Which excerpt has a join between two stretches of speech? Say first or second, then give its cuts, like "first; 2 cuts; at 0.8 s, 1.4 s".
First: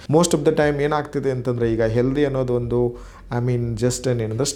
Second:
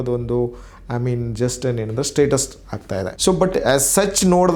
second; 1 cut; at 3.1 s